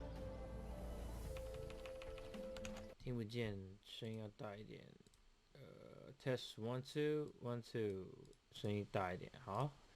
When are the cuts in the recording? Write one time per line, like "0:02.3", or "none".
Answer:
0:01.1

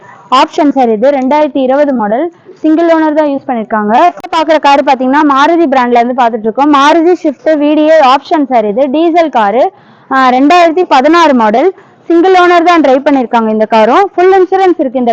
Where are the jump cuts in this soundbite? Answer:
0:04.2

